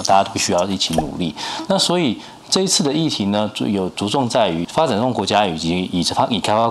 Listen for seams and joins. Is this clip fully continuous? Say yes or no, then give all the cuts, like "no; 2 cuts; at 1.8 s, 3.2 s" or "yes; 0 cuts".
yes; 0 cuts